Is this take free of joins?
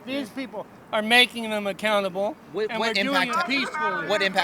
yes; 0 cuts

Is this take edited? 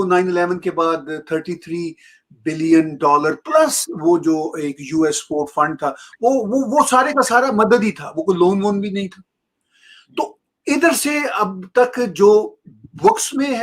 no; 0 cuts

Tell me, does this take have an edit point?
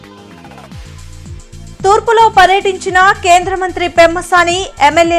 yes; 1 cut; at 1.3 s

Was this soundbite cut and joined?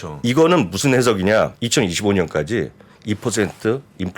yes; 1 cut; at 1.6 s

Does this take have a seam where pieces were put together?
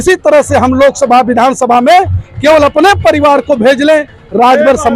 no; 0 cuts

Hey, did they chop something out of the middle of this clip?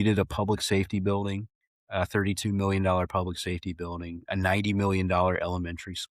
no; 0 cuts

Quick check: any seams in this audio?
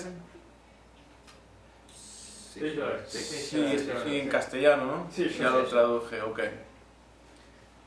yes; 1 cut; at 5.8 s

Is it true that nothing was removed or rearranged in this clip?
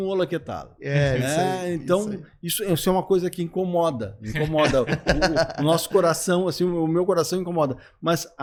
yes; 0 cuts

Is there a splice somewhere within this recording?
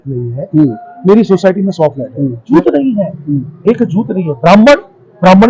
no; 0 cuts

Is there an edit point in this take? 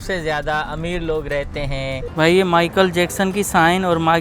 yes; 1 cut; at 2.0 s

